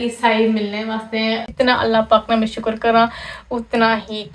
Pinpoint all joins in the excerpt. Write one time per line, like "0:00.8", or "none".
0:01.4